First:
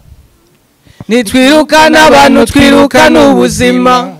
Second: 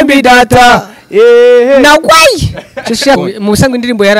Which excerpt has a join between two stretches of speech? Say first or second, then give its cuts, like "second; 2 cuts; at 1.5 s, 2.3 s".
second; 1 cut; at 3.2 s